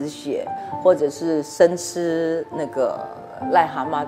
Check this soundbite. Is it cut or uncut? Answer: uncut